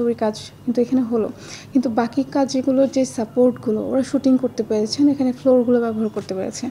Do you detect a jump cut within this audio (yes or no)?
no